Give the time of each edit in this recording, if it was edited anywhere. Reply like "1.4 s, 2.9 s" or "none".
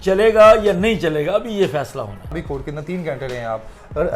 2.4 s